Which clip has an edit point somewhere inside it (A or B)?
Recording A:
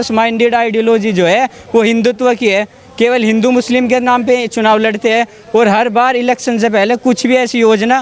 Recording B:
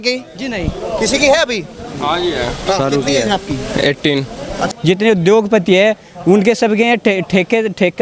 B